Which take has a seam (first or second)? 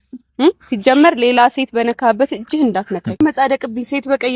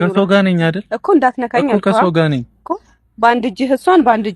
first